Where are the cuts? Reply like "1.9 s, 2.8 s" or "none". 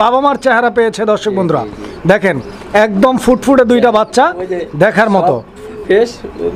none

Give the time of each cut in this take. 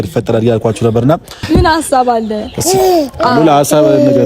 1.4 s

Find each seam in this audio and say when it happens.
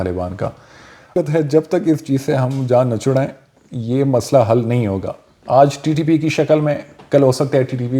1.1 s

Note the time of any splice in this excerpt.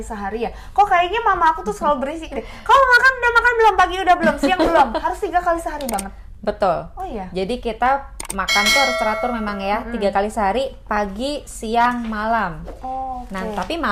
none

